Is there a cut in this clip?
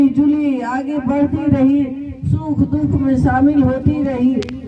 no; 0 cuts

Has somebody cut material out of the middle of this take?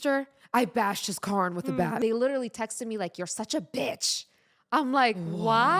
yes; 1 cut; at 2.0 s

